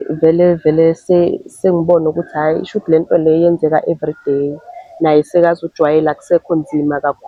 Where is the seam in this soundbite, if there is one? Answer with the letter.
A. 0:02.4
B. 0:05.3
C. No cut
C